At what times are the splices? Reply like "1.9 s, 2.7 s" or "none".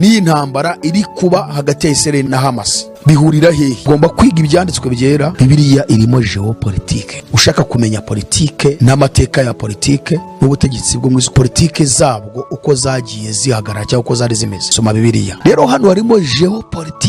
2.2 s, 3.8 s, 5.3 s, 15.3 s